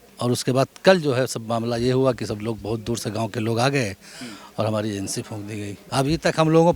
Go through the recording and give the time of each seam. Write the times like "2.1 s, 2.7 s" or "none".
5.8 s